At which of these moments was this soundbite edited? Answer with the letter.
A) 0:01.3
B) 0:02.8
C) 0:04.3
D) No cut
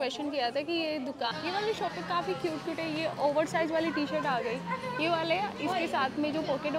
A